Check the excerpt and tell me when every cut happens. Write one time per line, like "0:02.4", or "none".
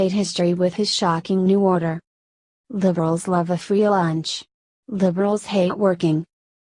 0:05.5